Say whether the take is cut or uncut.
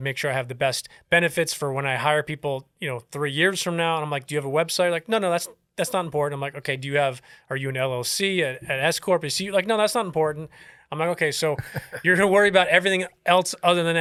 uncut